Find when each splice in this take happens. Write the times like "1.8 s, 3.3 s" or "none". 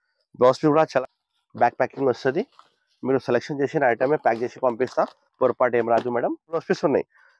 1.0 s, 6.6 s